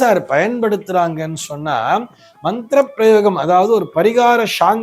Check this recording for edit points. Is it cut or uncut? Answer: uncut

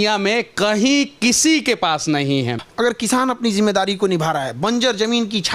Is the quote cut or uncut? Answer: cut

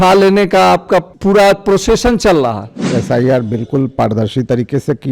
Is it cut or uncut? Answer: cut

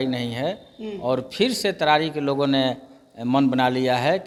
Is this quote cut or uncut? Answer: uncut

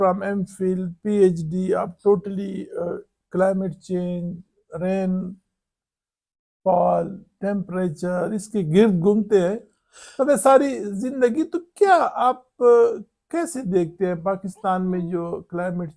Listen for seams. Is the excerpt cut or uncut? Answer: uncut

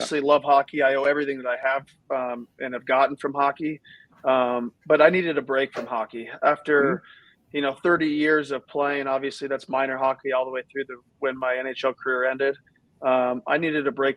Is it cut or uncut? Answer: uncut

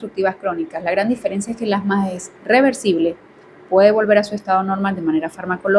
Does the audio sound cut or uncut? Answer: uncut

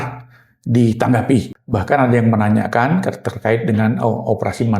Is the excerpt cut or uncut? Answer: cut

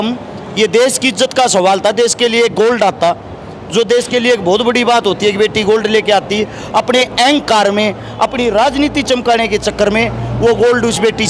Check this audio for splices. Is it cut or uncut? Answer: uncut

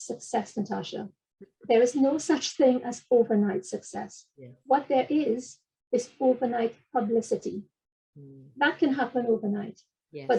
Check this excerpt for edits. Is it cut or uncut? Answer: uncut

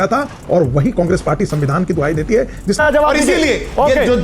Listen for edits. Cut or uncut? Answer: cut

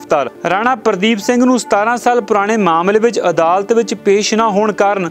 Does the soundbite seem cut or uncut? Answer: uncut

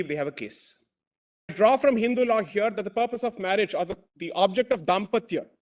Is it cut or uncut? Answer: cut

